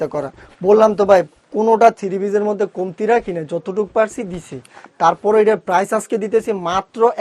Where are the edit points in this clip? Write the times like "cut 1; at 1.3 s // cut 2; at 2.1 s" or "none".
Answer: none